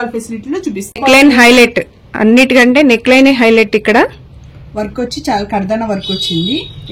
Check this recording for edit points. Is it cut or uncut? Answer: cut